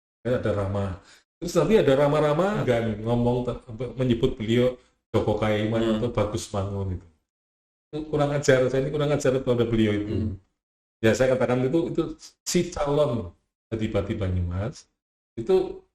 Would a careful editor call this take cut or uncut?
cut